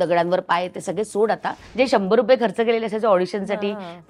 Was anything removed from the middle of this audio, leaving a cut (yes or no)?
yes